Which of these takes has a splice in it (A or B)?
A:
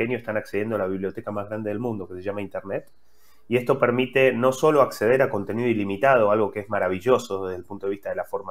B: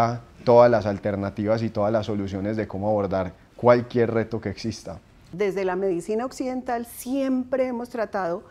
B